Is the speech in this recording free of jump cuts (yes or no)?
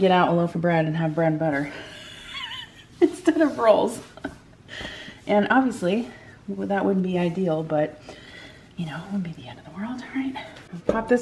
yes